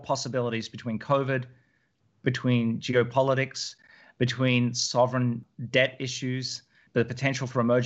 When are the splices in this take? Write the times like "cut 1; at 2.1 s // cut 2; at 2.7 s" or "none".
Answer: cut 1; at 5.5 s // cut 2; at 6.8 s